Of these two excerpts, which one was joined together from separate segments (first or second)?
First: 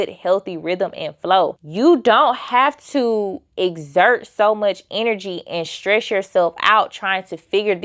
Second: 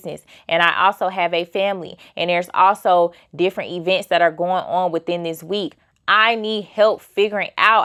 first